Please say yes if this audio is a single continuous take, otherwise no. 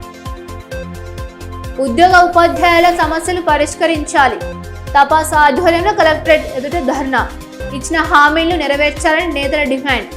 no